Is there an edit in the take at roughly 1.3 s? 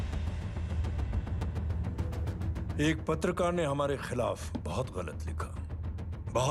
no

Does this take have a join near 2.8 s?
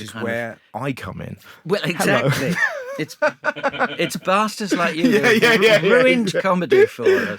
no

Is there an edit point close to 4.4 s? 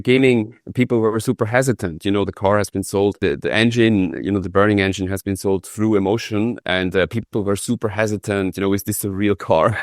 no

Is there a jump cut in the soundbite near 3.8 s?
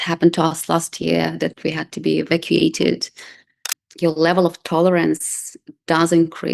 yes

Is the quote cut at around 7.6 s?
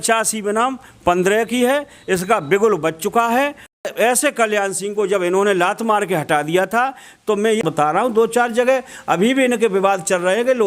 yes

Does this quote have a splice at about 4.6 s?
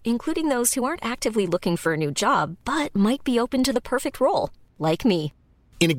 no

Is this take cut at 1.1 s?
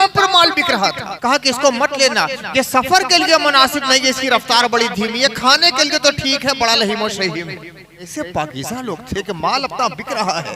yes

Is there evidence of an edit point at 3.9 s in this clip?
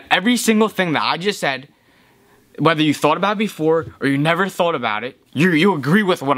no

